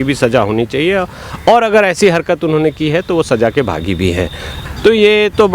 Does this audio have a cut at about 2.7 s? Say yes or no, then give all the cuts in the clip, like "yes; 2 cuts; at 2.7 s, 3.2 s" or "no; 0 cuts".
no; 1 cut; at 4.5 s